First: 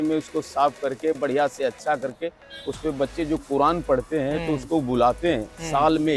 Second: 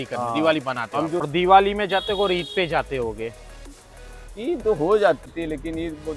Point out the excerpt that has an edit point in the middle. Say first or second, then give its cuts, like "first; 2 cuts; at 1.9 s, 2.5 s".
second; 2 cuts; at 1.3 s, 5.3 s